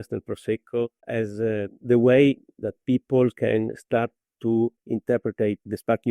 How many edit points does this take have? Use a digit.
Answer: 1